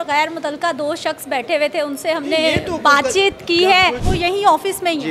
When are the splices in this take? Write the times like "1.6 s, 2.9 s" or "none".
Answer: 4.0 s